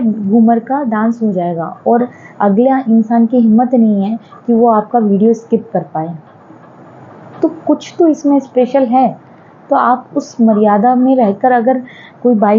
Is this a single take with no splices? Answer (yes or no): yes